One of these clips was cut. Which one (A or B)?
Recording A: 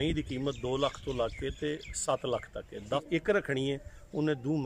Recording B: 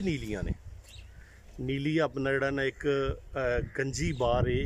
A